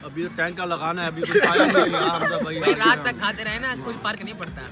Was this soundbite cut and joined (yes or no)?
no